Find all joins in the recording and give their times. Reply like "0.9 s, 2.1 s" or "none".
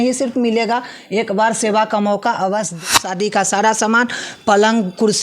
3.1 s